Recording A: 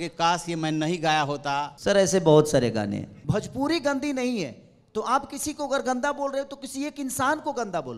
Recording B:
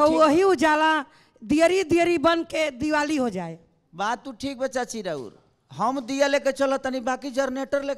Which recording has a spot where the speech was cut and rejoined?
A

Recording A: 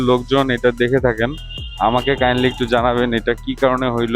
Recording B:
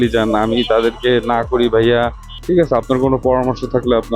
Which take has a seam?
B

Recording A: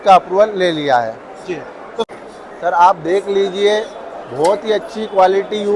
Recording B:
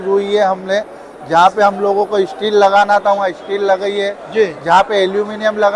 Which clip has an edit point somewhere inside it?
A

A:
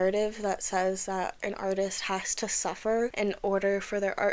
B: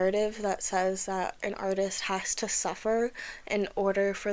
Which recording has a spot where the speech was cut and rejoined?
A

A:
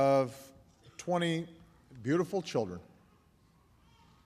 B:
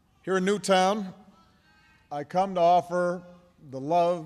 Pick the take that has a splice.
A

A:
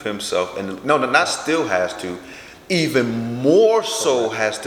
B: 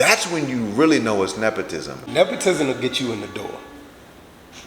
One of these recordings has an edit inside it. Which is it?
B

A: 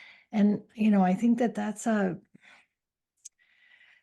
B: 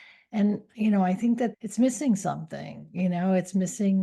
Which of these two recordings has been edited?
B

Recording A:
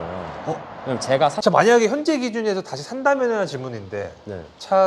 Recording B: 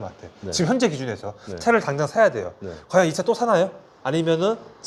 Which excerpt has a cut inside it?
A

